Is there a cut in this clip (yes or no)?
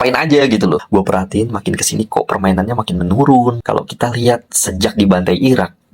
yes